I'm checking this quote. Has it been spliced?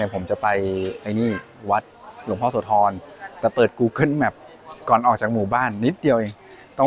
no; 0 cuts

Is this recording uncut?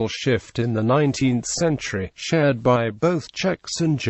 yes; 0 cuts

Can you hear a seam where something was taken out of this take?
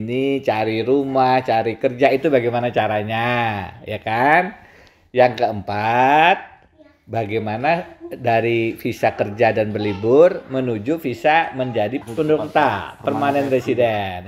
no; 0 cuts

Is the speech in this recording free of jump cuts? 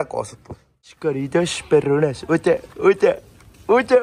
no; 1 cut; at 0.9 s

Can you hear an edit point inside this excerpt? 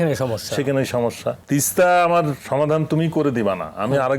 yes; 2 cuts; at 1.4 s, 2.4 s

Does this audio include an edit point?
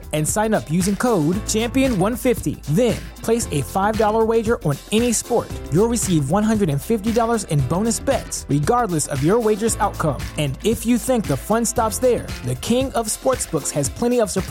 no; 0 cuts

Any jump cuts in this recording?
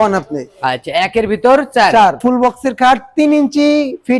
yes; 1 cut; at 2.2 s

